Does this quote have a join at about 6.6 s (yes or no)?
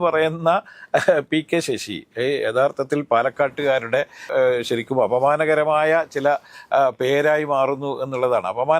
no